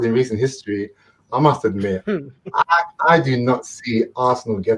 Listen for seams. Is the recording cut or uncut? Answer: uncut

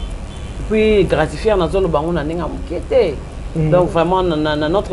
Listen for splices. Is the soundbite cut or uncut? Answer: uncut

